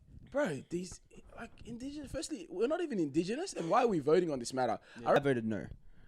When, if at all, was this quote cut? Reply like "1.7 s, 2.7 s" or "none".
5.2 s